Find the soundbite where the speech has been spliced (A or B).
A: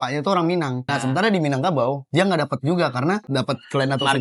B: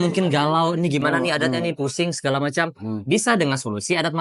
A